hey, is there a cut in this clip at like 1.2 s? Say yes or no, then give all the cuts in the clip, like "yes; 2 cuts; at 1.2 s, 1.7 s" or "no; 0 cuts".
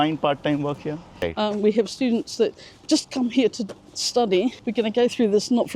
yes; 1 cut; at 1.2 s